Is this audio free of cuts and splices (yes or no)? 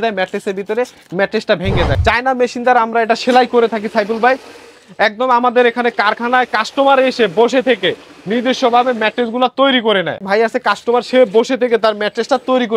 no